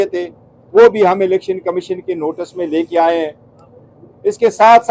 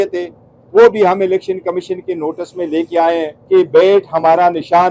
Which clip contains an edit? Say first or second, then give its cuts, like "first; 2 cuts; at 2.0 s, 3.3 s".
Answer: second; 1 cut; at 3.3 s